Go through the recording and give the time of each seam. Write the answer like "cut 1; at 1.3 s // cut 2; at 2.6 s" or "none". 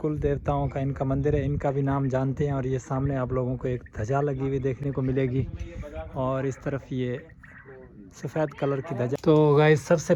none